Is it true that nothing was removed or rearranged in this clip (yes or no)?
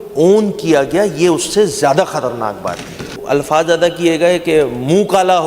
no